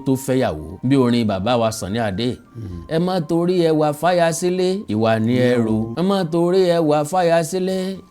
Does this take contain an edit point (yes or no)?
no